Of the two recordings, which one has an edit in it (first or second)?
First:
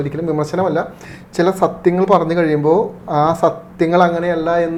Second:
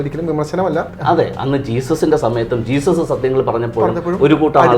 second